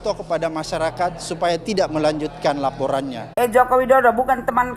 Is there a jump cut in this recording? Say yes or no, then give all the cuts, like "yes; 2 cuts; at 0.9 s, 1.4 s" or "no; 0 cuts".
yes; 1 cut; at 3.3 s